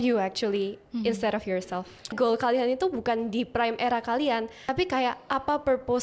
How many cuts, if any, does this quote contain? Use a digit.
2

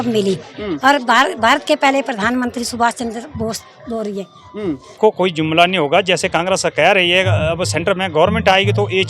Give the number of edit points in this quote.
1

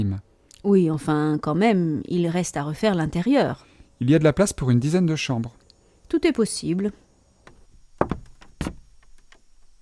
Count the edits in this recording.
0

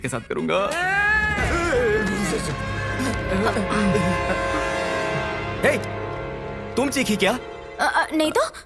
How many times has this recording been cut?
0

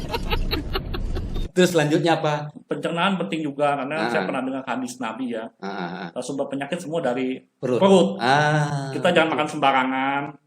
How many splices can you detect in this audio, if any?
2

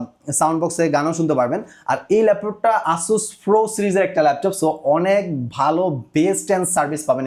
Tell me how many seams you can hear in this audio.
0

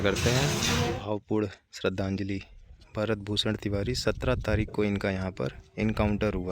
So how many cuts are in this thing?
1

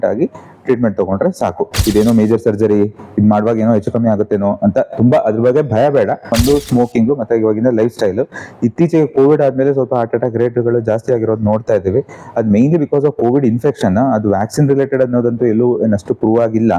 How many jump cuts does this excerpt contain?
2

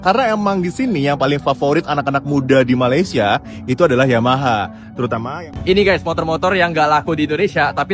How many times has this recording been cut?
1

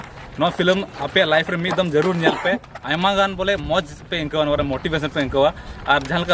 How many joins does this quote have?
0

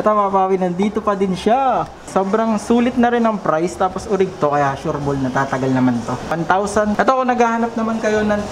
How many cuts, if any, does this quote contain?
2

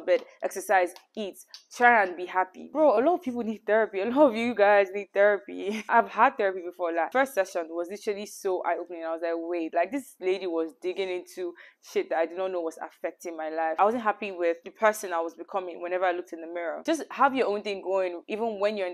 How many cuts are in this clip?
4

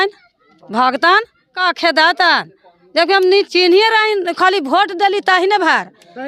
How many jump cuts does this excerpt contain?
1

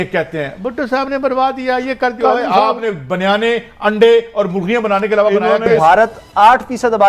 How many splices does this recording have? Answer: 1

